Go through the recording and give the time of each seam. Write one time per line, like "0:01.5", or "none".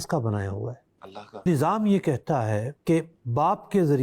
0:01.5

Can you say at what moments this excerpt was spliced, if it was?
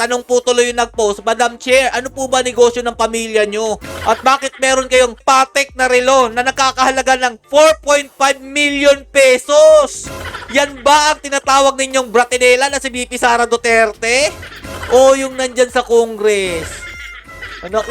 none

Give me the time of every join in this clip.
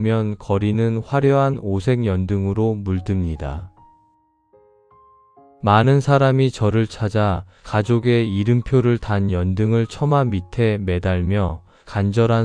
0:05.6

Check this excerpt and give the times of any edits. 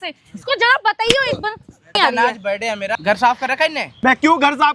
0:02.0
0:03.0
0:03.9

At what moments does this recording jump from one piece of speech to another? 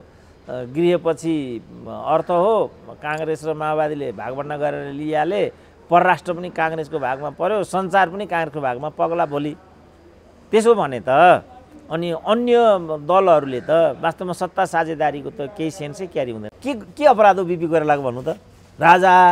0:16.6

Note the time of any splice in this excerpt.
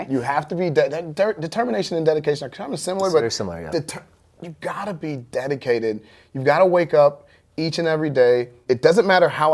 0:08.6

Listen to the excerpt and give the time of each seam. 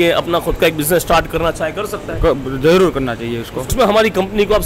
0:03.7

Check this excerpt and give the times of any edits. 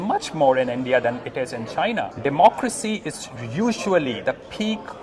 0:02.1

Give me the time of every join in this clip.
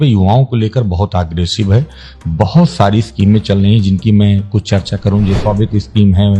0:05.4

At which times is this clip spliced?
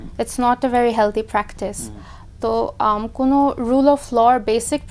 none

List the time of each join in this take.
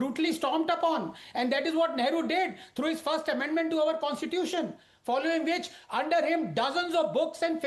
none

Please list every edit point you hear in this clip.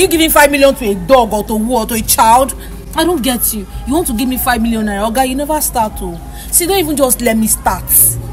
none

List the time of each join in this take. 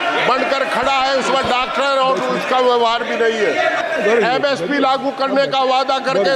0:03.8

